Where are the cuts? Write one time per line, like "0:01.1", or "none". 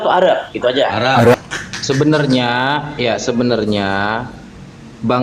0:01.3